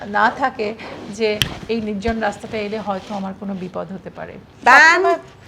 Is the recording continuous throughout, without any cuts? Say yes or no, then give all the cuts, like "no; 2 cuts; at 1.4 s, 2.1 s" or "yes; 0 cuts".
no; 1 cut; at 4.5 s